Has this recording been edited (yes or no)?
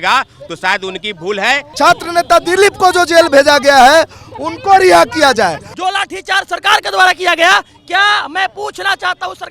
yes